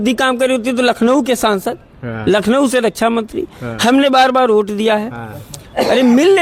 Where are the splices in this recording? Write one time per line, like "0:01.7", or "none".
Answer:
none